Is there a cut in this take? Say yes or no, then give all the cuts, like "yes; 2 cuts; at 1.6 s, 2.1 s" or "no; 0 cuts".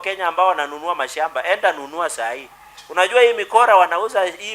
no; 0 cuts